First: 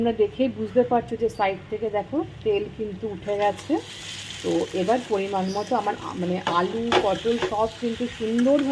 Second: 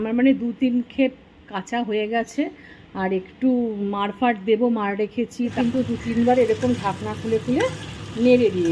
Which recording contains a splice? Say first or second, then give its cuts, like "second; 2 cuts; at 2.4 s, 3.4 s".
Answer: second; 1 cut; at 5.5 s